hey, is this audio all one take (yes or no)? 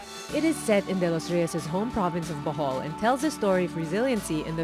yes